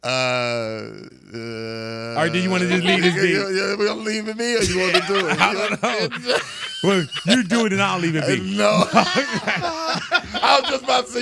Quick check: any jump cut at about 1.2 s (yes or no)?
no